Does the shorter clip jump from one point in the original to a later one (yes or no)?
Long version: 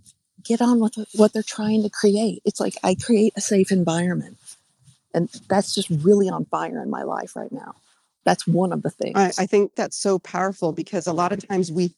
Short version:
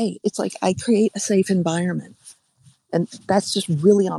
no